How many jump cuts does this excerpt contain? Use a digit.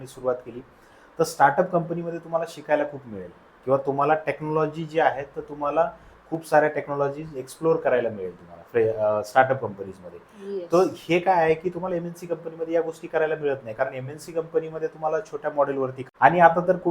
1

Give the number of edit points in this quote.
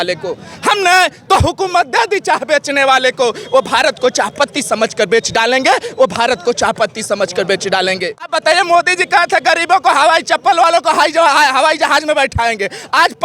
1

